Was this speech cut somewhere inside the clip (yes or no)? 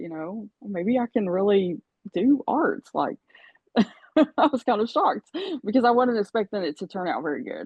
no